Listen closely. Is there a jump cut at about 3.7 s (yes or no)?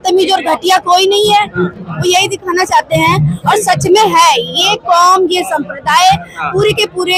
no